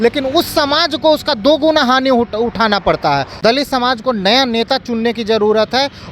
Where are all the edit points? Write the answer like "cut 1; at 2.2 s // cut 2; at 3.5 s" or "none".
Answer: cut 1; at 3.3 s